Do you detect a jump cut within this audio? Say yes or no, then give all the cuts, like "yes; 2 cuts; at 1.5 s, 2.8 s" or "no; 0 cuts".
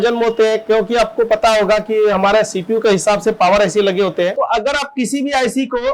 yes; 1 cut; at 4.3 s